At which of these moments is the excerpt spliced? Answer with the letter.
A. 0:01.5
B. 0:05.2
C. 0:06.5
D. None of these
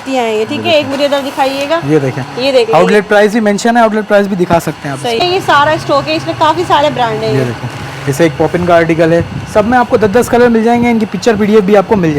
B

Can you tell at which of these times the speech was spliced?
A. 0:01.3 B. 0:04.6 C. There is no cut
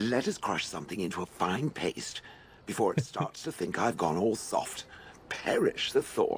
C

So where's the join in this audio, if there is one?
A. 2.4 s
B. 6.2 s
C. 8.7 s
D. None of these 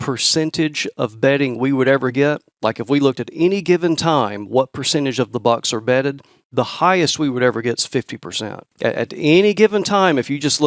C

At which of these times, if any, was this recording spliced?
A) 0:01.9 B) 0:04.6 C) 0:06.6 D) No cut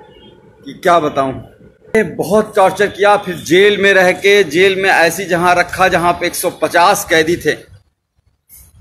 A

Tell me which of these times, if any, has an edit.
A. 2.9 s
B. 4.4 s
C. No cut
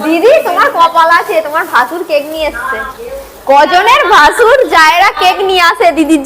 A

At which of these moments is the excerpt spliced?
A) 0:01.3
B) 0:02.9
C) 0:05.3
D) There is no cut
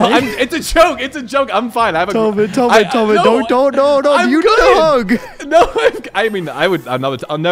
D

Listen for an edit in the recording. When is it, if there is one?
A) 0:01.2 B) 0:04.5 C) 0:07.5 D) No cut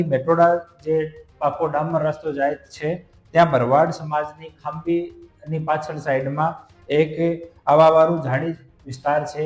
D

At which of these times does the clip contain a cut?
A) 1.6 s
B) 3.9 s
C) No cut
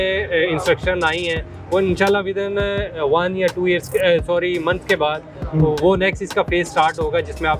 C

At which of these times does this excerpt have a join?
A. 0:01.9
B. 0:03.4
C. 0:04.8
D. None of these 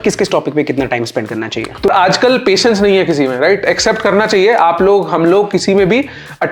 A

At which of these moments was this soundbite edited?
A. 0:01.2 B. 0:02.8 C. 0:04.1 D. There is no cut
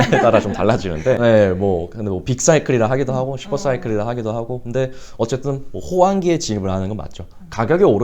A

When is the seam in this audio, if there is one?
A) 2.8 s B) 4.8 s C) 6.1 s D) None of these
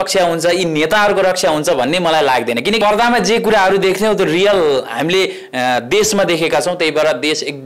A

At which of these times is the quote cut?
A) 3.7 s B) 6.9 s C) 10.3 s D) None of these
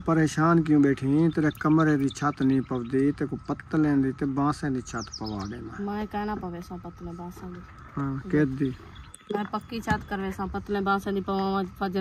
D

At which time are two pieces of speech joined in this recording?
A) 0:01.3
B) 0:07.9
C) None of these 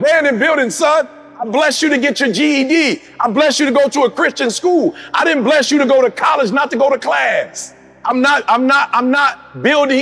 B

